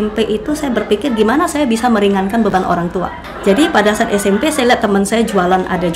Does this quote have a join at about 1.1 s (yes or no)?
no